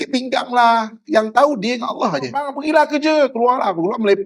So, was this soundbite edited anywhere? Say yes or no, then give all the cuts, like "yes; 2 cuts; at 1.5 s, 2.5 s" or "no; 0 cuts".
yes; 1 cut; at 2.5 s